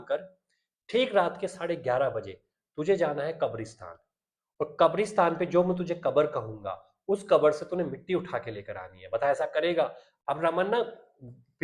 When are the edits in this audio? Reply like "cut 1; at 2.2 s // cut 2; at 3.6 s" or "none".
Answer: cut 1; at 10.1 s